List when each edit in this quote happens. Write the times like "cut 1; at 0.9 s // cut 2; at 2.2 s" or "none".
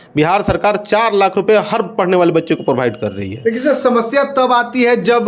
none